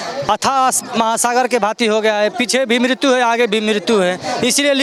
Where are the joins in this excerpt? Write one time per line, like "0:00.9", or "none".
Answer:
none